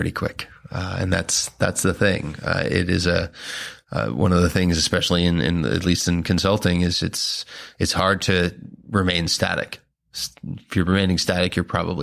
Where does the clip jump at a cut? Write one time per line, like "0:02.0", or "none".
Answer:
none